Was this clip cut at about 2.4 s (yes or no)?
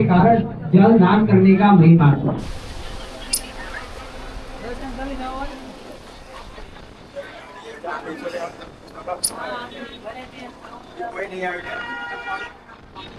no